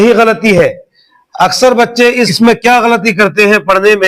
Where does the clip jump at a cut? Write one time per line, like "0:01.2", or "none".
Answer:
0:01.2
0:02.3